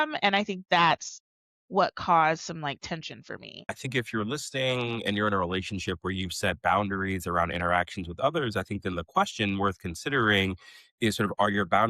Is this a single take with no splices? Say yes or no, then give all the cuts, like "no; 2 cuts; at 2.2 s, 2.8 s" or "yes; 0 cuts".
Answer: no; 1 cut; at 3.8 s